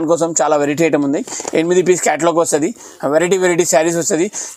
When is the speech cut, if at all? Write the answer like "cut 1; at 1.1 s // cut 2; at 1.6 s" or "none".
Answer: none